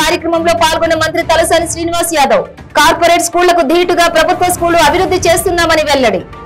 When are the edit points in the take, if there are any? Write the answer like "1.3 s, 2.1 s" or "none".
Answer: none